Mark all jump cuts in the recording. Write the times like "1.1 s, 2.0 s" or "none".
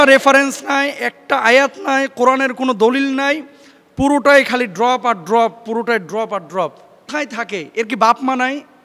7.1 s